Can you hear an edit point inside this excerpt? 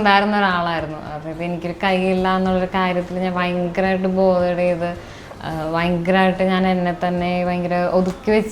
no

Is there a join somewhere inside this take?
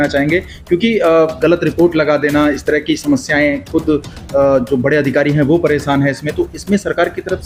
no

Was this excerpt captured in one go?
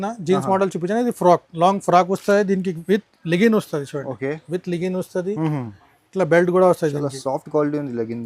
yes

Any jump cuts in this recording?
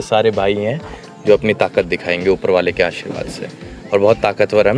no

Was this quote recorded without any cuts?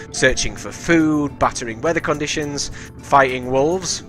yes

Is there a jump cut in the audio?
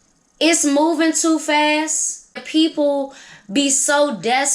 yes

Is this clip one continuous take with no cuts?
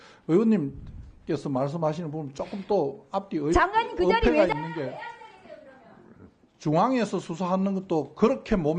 yes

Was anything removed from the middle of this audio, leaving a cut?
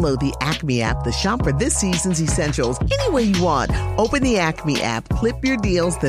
no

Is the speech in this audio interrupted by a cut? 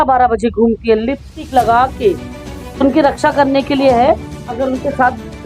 yes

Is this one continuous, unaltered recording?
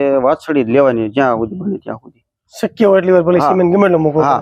yes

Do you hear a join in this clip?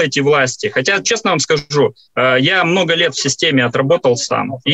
no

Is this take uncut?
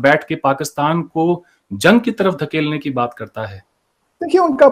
yes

